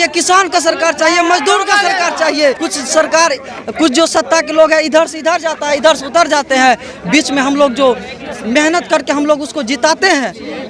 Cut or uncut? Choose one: cut